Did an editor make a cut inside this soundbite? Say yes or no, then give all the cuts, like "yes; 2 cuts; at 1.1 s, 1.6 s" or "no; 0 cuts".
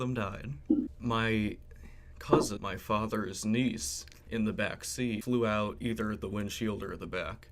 yes; 3 cuts; at 0.9 s, 2.6 s, 5.2 s